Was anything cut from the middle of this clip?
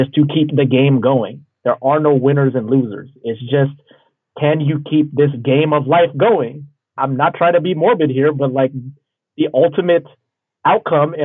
yes; 1 cut; at 6.9 s

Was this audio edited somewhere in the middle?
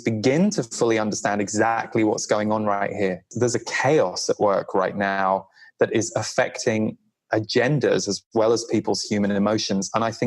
yes; 1 cut; at 3.3 s

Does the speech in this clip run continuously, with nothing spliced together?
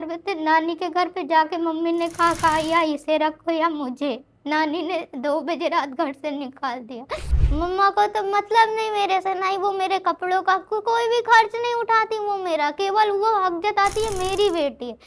no; 1 cut; at 7.4 s

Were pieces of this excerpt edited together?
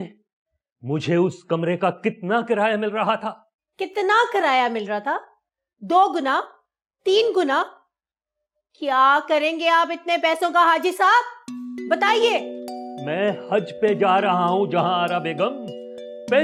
no; 0 cuts

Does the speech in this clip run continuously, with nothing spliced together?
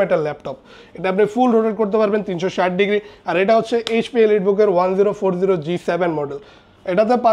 yes; 0 cuts

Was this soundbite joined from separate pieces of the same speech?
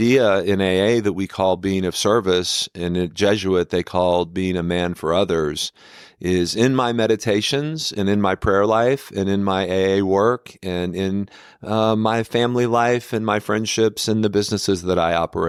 no; 0 cuts

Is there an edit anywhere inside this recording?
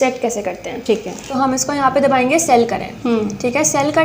yes; 1 cut; at 1.2 s

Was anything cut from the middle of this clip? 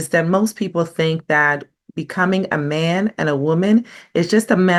no; 0 cuts

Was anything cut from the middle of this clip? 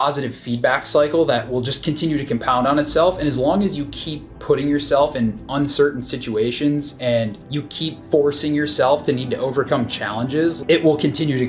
no; 0 cuts

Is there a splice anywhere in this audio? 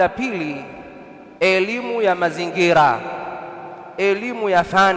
yes; 1 cut; at 1.4 s

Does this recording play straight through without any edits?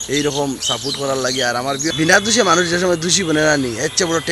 no; 1 cut; at 1.9 s

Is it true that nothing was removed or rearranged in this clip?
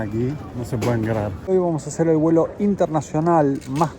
no; 1 cut; at 1.5 s

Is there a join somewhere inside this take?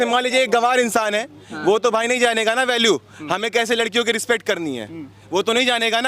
no; 0 cuts

